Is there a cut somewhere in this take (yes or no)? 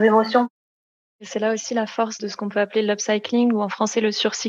yes